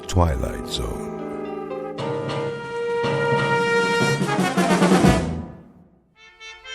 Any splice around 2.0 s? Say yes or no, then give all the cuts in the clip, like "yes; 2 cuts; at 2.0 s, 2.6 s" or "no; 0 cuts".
no; 1 cut; at 5.0 s